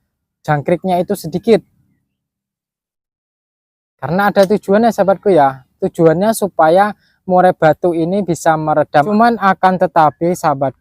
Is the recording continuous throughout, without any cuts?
no; 1 cut; at 9.1 s

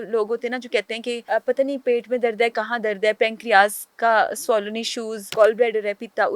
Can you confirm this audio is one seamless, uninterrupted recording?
no; 2 cuts; at 1.2 s, 5.2 s

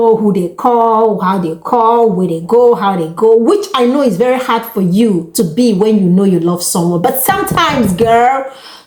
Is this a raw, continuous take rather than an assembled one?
yes; 0 cuts

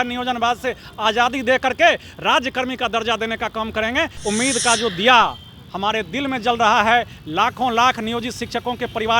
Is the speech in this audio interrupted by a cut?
yes; 1 cut; at 4.2 s

